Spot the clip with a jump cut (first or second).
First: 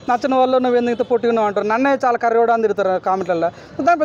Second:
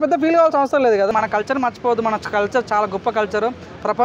second